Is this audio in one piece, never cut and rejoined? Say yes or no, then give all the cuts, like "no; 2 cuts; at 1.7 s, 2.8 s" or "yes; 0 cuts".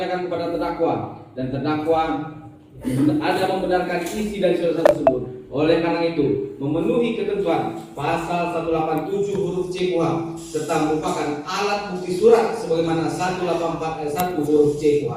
yes; 0 cuts